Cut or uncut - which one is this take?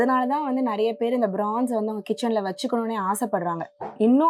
uncut